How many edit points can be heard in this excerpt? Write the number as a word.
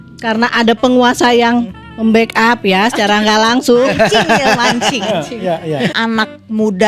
one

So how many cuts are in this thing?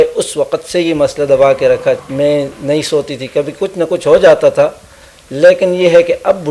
one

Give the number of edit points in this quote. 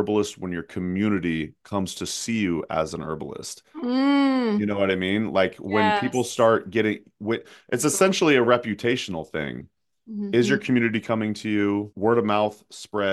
one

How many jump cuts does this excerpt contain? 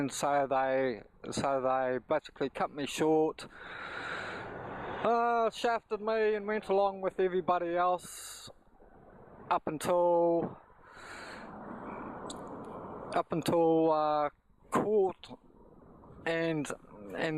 one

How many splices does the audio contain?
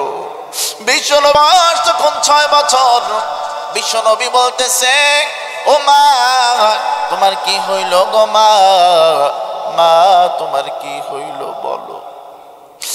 one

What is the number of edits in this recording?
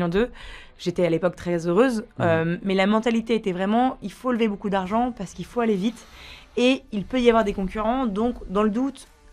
zero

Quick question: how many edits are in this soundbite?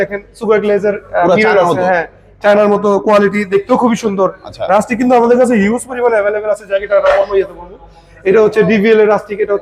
zero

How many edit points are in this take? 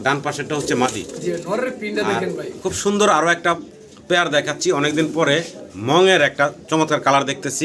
one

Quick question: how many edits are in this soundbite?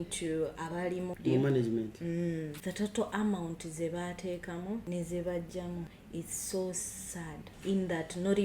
five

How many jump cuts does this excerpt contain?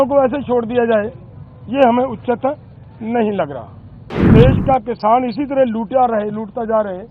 one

